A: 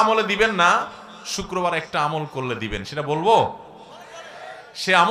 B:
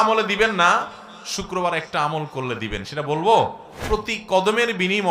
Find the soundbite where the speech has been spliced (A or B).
B